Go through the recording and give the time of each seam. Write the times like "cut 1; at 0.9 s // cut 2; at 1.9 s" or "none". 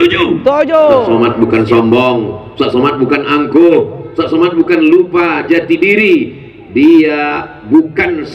cut 1; at 1.1 s